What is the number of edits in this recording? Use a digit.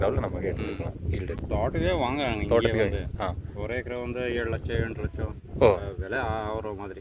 1